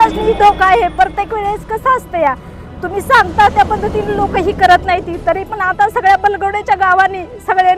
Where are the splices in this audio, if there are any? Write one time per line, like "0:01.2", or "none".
none